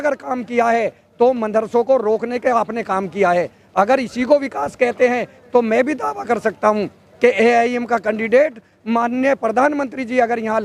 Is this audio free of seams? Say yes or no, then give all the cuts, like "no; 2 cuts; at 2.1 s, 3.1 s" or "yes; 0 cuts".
yes; 0 cuts